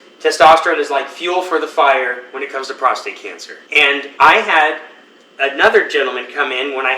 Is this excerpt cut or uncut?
cut